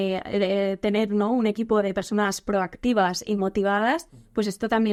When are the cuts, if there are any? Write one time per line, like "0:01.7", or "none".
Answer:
none